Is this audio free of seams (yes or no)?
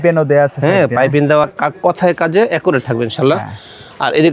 no